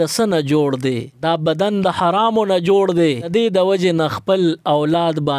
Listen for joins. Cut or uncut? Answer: cut